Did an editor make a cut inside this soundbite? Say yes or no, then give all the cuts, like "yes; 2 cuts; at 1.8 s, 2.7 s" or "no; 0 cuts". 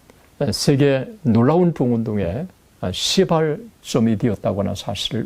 no; 0 cuts